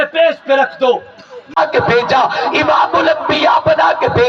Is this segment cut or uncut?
cut